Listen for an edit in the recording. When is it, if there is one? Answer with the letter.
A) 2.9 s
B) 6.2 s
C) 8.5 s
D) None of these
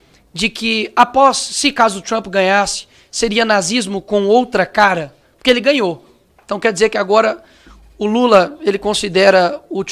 D